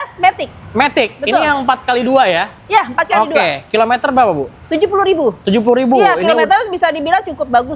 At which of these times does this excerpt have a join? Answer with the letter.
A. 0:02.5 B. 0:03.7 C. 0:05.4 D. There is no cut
D